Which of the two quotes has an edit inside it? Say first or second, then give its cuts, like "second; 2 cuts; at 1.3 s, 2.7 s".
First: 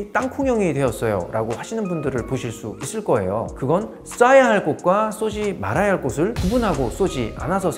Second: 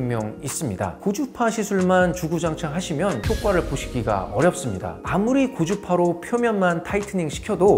second; 2 cuts; at 1.0 s, 5.0 s